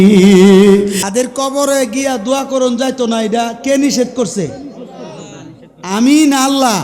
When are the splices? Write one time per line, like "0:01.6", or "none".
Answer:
0:01.0